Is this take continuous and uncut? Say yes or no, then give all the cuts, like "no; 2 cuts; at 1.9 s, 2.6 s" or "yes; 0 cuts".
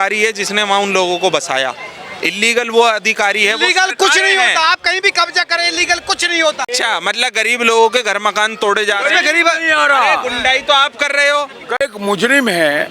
no; 2 cuts; at 6.6 s, 11.8 s